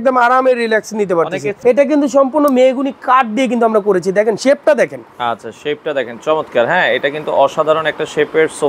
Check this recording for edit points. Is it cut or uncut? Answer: cut